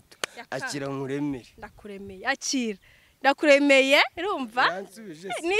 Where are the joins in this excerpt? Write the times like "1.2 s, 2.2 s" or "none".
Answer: none